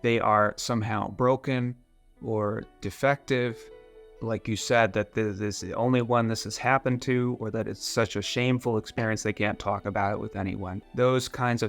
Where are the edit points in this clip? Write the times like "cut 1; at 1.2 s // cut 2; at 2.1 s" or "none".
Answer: cut 1; at 10.8 s

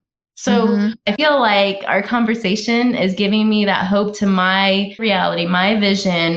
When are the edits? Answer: cut 1; at 1.2 s // cut 2; at 5.0 s

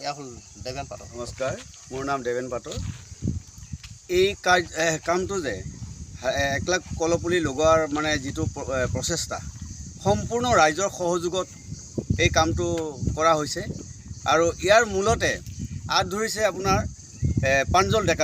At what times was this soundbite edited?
cut 1; at 1.1 s

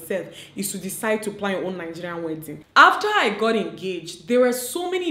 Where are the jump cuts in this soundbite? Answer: cut 1; at 2.5 s

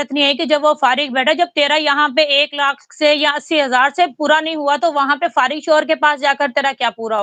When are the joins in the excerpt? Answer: none

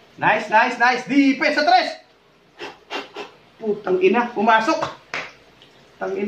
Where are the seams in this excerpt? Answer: none

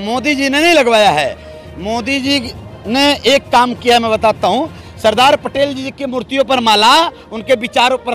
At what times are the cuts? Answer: none

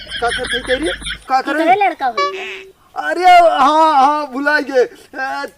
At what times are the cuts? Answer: cut 1; at 1.1 s

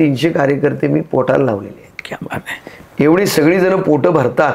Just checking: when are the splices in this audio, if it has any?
none

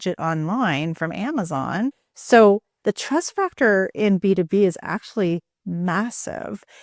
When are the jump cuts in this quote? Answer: cut 1; at 2.1 s

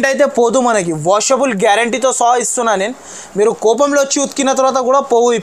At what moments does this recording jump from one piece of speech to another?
none

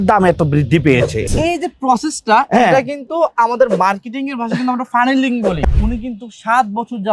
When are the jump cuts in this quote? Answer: cut 1; at 1.3 s // cut 2; at 5.6 s

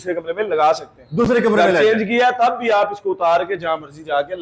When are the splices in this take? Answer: none

